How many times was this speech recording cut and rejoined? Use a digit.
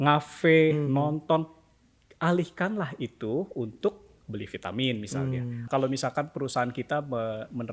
1